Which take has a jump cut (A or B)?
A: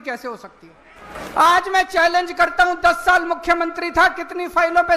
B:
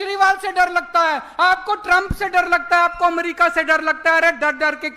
A